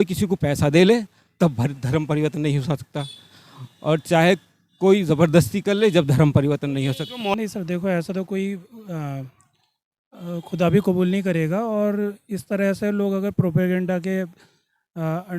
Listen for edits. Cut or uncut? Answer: cut